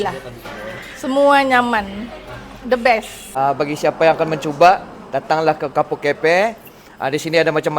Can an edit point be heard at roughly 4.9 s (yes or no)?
no